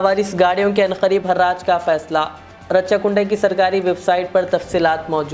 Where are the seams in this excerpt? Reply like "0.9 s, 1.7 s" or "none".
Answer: none